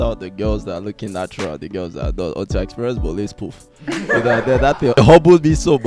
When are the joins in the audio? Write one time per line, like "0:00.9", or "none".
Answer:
0:05.0